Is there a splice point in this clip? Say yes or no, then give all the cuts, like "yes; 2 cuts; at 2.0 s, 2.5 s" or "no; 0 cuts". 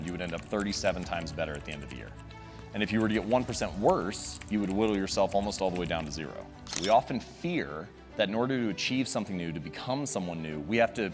yes; 1 cut; at 6.8 s